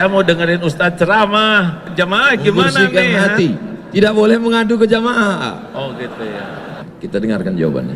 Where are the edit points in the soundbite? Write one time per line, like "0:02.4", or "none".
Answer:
0:01.8
0:06.9